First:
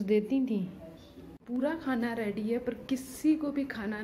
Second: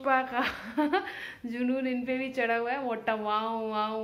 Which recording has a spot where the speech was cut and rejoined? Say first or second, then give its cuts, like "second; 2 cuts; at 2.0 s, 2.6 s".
first; 1 cut; at 1.4 s